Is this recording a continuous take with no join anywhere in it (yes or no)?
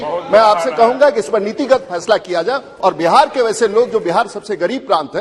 yes